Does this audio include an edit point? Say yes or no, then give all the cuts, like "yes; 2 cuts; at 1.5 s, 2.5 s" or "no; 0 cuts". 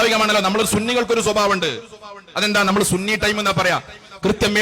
no; 0 cuts